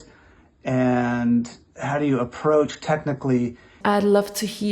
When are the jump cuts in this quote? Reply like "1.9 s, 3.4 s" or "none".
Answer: 3.7 s

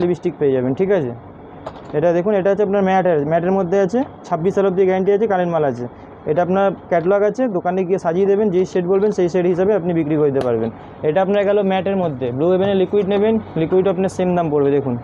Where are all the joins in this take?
none

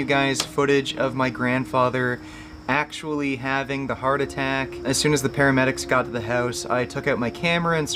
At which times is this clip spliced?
4.9 s

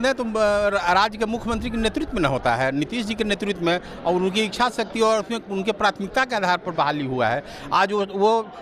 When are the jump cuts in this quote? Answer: none

